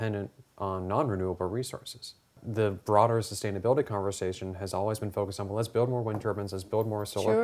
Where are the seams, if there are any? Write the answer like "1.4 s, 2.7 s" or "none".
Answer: 2.4 s